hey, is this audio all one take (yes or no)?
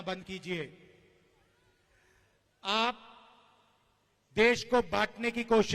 yes